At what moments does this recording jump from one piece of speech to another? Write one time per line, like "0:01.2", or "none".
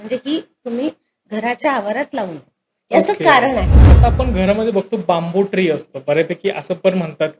0:03.8